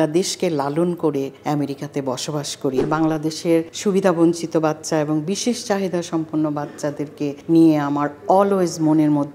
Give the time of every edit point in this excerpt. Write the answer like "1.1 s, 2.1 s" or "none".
1.3 s, 2.8 s, 3.7 s, 7.4 s